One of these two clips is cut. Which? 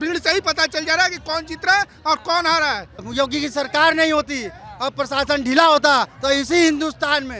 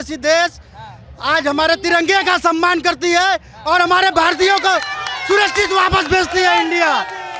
first; 1 cut; at 2.9 s

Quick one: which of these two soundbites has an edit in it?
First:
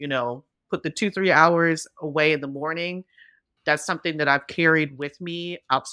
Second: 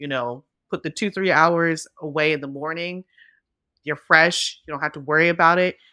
first; 1 cut; at 3.5 s

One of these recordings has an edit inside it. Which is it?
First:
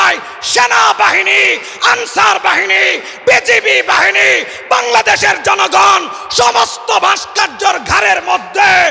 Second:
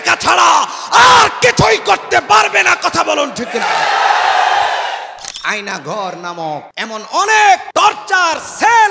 second; 3 cuts; at 5.3 s, 6.7 s, 7.7 s

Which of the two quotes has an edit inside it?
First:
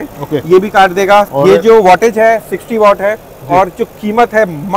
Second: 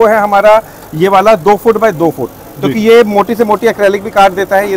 first; 1 cut; at 1.3 s

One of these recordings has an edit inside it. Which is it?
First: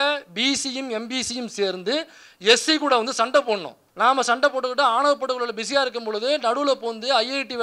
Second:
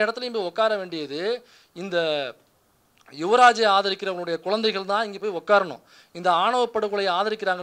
first; 1 cut; at 3.8 s

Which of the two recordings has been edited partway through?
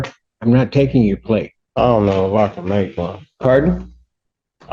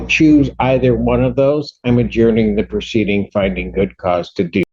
first; 1 cut; at 1.6 s

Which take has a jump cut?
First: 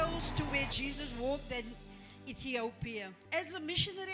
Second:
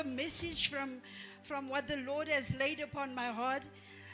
first; 1 cut; at 3.2 s

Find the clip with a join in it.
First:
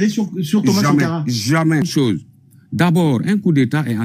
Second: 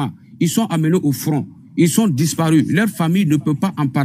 first; 1 cut; at 1.9 s

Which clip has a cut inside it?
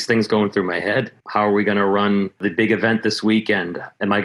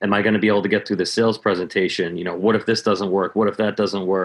first; 2 cuts; at 1.2 s, 2.4 s

